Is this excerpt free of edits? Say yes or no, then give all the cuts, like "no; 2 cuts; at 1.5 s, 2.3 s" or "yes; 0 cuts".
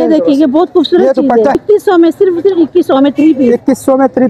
no; 1 cut; at 1.6 s